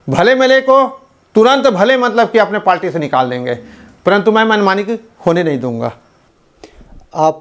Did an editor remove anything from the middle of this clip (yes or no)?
yes